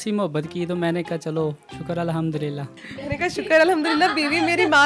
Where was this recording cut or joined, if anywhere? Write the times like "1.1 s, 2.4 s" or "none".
2.8 s